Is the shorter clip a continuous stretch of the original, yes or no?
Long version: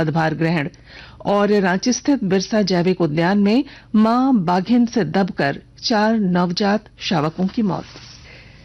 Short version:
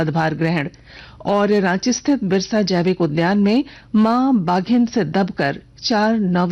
yes